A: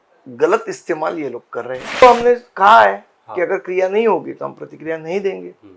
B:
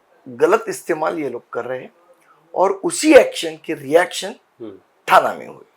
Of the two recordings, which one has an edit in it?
A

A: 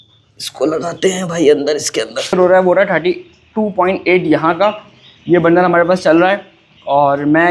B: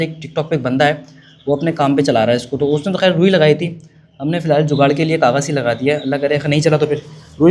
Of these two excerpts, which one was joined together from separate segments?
A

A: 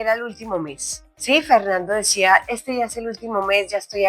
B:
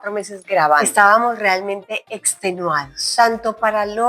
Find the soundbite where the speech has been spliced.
B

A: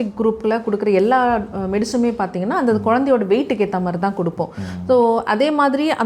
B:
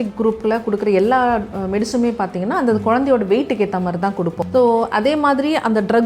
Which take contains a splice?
B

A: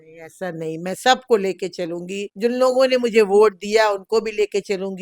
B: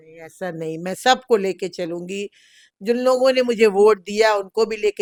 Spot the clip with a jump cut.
A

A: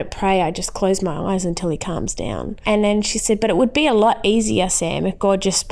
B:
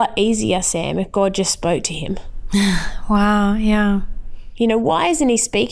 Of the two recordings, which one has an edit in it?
A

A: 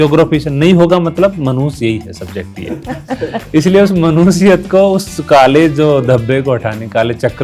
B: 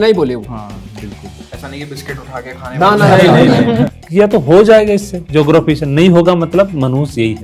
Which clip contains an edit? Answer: B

